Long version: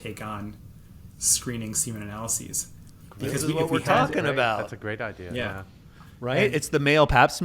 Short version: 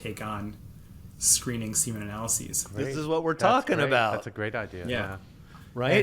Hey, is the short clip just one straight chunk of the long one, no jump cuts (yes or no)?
no